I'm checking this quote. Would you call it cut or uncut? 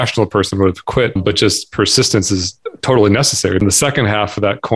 cut